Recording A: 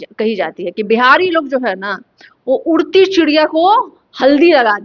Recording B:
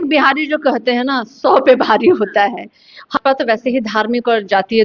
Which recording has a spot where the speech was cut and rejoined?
B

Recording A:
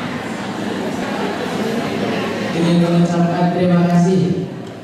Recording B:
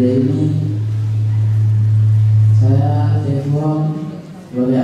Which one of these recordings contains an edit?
A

